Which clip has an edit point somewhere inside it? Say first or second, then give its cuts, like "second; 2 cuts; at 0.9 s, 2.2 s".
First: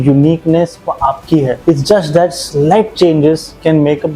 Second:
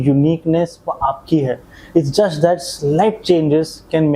first; 1 cut; at 1.6 s